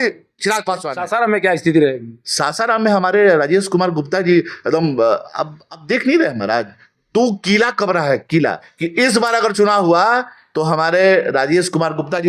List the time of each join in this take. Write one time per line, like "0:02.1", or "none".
0:00.9
0:08.7

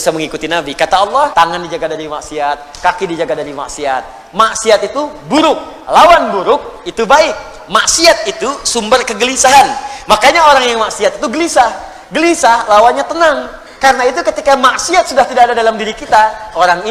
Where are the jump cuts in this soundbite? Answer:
0:01.3

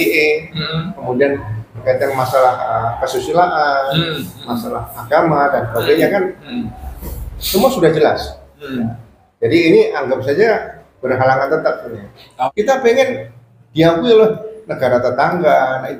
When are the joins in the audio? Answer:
0:12.3

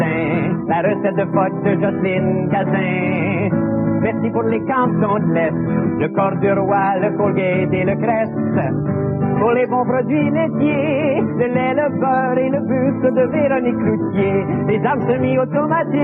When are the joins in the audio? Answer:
0:13.6

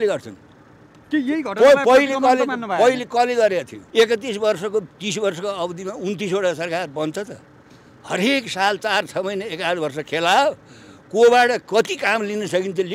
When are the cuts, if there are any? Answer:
0:03.8

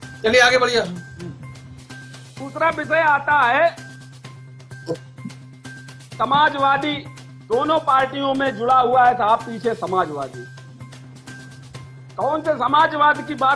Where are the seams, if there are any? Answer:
0:10.5
0:12.1

